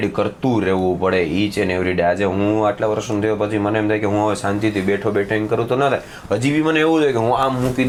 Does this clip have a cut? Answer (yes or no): no